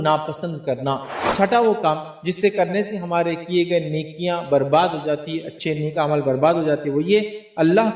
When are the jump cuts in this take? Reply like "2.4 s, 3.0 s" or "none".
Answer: 1.2 s